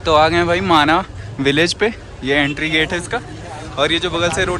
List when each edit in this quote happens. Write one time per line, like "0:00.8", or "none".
none

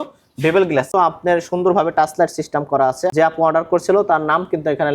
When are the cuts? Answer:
0:00.9
0:03.1

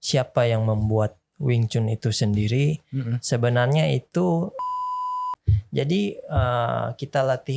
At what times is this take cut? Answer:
0:04.9

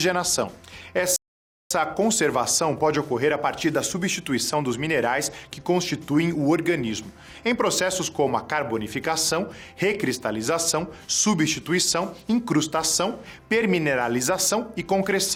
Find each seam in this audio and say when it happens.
none

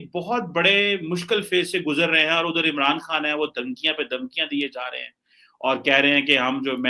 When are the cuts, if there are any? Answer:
none

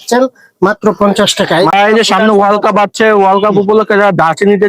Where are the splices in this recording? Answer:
0:01.7

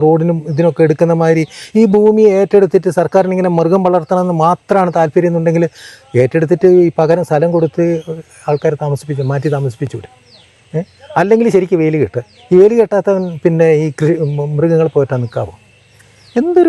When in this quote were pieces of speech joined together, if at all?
none

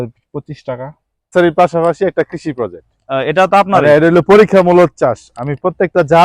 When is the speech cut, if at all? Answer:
0:01.3

